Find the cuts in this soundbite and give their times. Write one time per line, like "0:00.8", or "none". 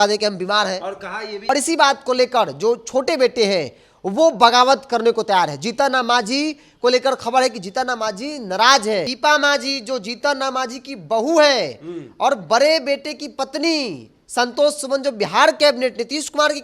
0:01.3
0:09.1